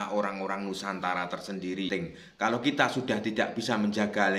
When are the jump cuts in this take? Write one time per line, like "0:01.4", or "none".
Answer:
0:02.4